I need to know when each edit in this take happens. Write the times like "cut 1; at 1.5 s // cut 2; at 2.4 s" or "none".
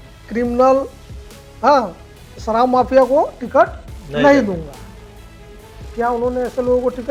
none